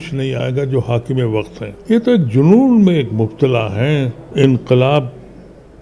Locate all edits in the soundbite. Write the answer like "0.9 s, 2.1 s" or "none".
1.7 s, 4.2 s

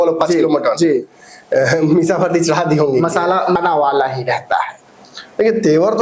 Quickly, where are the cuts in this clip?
3.6 s

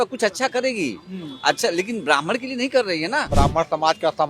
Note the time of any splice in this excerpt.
3.3 s

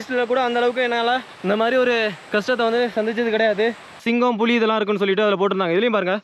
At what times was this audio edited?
3.9 s

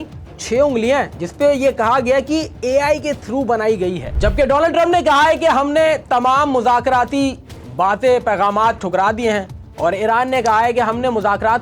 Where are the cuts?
4.1 s

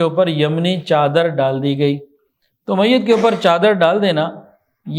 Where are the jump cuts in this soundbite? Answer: none

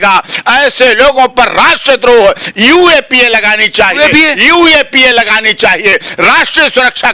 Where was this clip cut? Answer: none

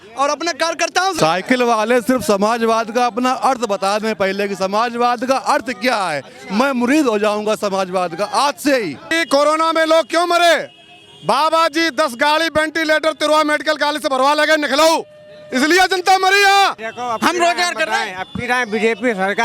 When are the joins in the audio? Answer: 1.2 s, 9.1 s, 16.9 s

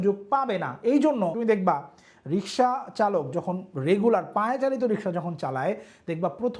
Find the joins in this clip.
1.4 s

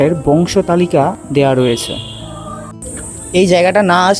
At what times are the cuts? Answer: 1.2 s, 2.8 s

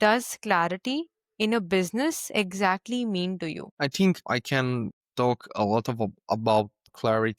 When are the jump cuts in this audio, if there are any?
none

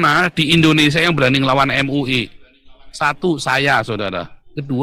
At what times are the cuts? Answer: none

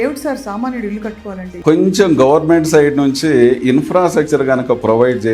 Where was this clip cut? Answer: 1.6 s

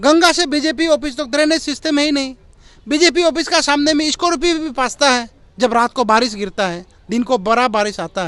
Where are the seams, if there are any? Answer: none

